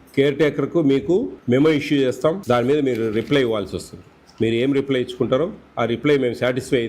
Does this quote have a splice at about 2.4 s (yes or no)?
yes